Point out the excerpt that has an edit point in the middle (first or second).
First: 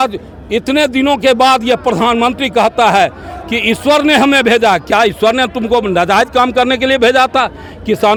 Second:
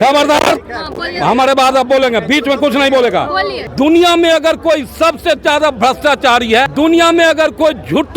second